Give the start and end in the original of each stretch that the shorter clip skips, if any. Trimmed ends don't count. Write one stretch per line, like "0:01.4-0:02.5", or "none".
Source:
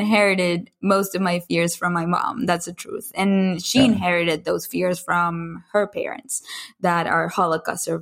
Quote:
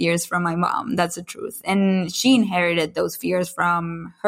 none